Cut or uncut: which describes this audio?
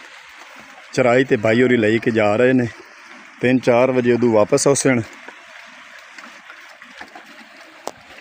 uncut